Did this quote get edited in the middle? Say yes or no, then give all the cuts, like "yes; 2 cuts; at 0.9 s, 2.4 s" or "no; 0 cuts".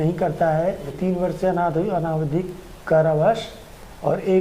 yes; 1 cut; at 0.9 s